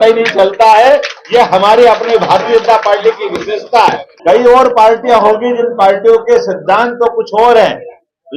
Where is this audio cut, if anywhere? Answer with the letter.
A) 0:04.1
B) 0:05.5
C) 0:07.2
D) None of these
A